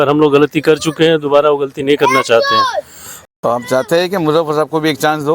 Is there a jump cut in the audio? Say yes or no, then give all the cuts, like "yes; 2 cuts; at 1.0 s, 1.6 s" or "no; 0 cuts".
yes; 1 cut; at 3.2 s